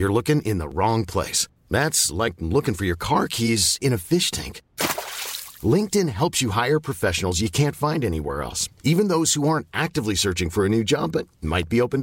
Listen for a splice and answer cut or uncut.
uncut